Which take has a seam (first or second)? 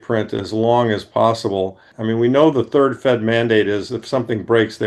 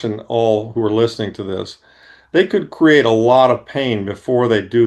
first